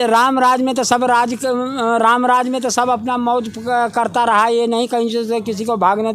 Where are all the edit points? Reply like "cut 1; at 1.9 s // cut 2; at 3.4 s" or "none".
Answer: none

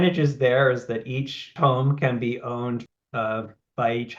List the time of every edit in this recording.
cut 1; at 1.5 s // cut 2; at 2.9 s

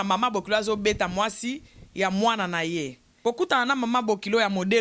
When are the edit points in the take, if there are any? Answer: cut 1; at 3.0 s

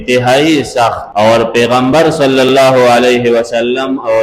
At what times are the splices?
cut 1; at 1.0 s

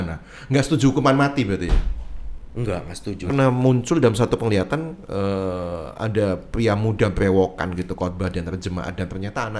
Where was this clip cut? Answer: cut 1; at 3.3 s

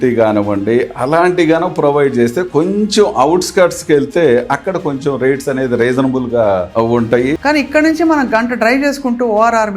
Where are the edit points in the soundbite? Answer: cut 1; at 7.4 s

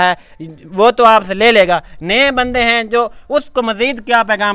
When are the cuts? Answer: none

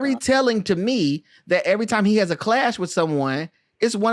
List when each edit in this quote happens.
none

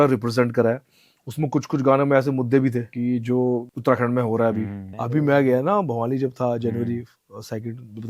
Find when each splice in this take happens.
cut 1; at 2.9 s // cut 2; at 3.7 s // cut 3; at 4.9 s

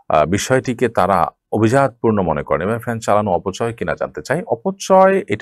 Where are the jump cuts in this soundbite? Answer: none

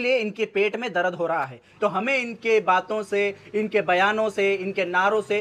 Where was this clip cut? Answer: cut 1; at 1.6 s

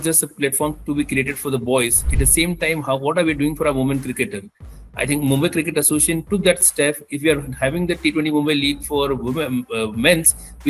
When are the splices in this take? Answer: none

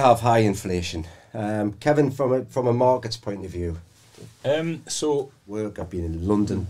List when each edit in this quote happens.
cut 1; at 5.7 s

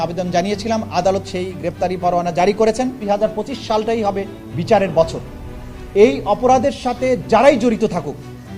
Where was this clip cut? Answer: cut 1; at 3.0 s

